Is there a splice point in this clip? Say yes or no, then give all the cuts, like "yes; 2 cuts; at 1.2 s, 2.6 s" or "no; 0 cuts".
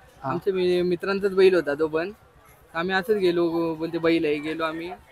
no; 0 cuts